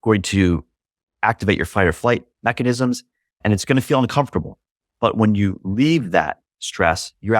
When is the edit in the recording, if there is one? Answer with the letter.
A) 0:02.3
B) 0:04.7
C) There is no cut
A